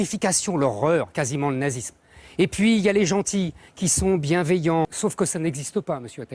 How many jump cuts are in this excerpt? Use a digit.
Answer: 1